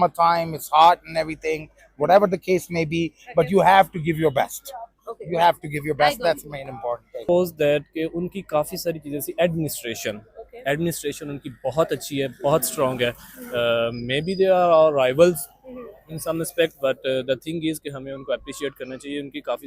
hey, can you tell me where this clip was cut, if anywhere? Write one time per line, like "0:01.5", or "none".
0:07.2